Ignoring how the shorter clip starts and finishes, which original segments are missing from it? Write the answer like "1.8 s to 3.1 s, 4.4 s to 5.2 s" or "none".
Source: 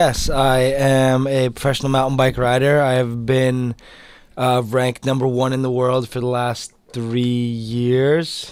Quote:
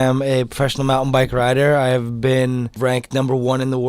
3.8 s to 4.7 s